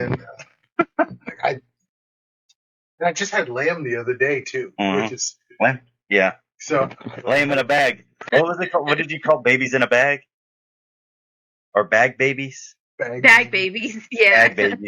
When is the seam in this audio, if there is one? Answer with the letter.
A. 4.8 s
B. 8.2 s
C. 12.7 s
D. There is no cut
B